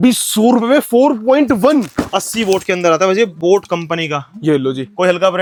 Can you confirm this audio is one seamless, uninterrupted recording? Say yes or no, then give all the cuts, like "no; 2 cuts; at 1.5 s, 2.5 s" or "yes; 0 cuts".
yes; 0 cuts